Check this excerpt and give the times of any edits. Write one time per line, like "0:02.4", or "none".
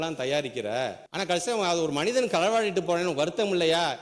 0:01.0